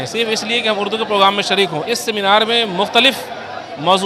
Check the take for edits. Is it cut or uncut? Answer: cut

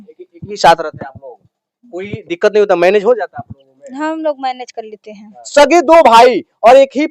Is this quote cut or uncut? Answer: cut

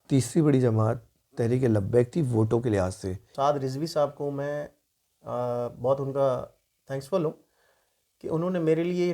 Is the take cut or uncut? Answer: cut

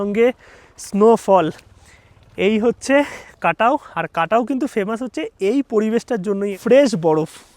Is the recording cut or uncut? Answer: cut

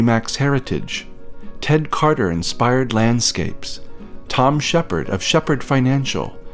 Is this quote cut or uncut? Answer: uncut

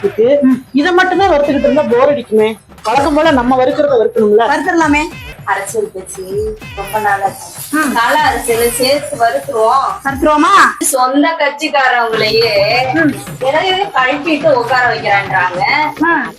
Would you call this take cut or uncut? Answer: cut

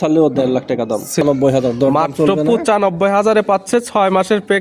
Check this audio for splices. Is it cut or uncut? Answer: cut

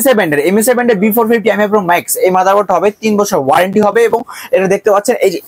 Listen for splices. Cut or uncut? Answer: uncut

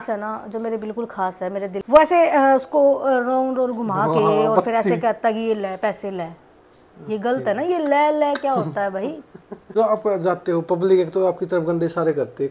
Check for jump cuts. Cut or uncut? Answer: cut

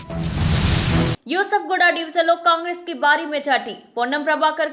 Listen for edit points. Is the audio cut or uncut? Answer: uncut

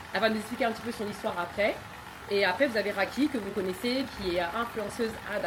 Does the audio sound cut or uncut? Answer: uncut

